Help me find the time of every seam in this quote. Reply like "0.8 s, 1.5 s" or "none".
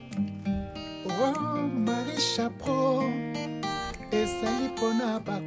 none